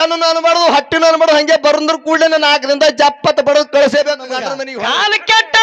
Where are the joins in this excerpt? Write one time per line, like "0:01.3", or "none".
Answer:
0:04.6